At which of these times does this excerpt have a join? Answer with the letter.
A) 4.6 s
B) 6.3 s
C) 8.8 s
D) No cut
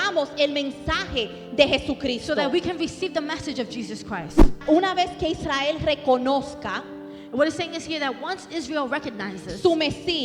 A